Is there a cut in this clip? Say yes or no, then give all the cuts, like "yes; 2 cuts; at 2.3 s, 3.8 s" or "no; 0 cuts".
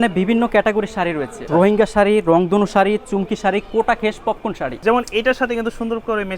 yes; 2 cuts; at 1.3 s, 4.7 s